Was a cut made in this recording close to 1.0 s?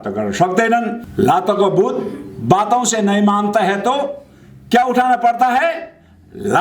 yes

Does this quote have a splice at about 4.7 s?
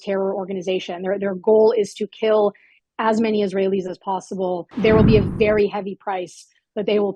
yes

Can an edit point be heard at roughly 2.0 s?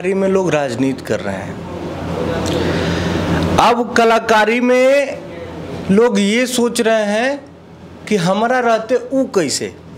no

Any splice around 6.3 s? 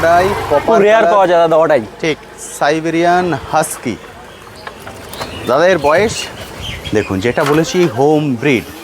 yes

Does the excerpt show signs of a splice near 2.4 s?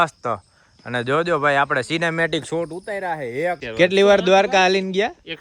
no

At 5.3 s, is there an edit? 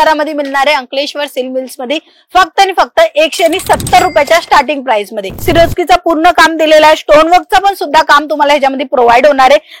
yes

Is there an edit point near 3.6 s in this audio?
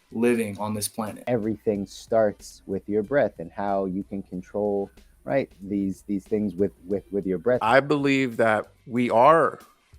no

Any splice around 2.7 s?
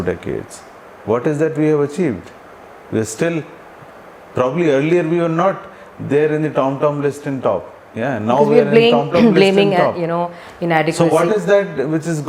no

